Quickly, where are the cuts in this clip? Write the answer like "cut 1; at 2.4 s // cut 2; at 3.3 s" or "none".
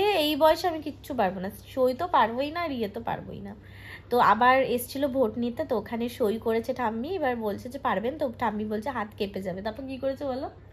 none